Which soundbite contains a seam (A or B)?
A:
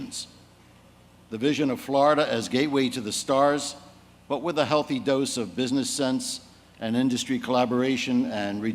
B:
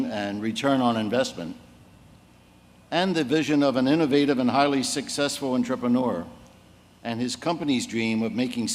A